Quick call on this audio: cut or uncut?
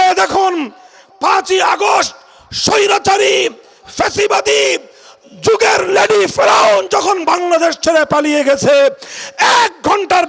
uncut